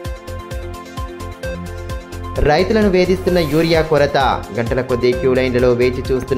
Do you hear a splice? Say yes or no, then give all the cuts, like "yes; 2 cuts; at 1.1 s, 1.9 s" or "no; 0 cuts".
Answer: yes; 1 cut; at 1.5 s